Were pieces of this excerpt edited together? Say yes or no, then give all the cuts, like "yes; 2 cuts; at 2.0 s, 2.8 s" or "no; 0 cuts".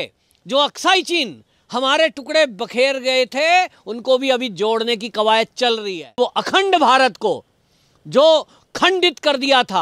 yes; 1 cut; at 6.2 s